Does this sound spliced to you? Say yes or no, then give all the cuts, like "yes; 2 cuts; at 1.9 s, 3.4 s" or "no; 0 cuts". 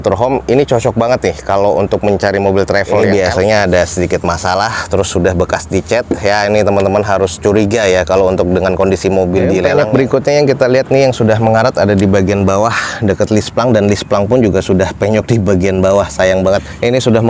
yes; 2 cuts; at 3.0 s, 9.7 s